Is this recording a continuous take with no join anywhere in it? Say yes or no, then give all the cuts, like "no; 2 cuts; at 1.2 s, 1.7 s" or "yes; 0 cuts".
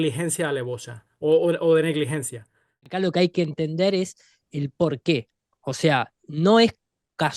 no; 1 cut; at 2.8 s